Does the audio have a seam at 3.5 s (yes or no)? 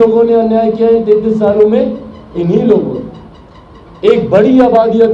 no